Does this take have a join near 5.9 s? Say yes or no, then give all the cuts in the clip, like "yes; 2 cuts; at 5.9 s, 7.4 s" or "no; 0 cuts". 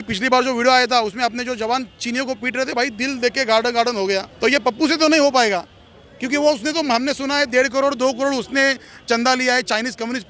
no; 1 cut; at 4.3 s